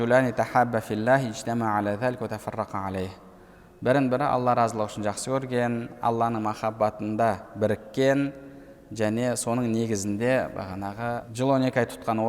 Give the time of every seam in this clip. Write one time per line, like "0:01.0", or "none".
0:11.3